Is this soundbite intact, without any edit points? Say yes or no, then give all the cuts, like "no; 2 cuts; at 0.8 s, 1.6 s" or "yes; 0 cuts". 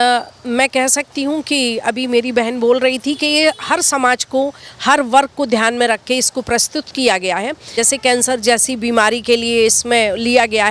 no; 1 cut; at 7.7 s